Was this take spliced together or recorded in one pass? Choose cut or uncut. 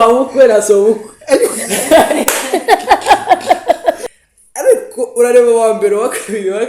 cut